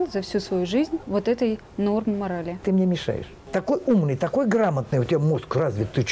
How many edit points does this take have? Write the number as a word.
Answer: two